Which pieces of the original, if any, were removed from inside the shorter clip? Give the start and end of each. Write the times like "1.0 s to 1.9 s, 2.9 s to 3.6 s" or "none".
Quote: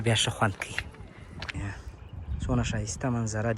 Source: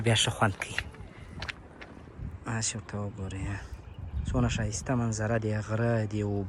1.5 s to 3.4 s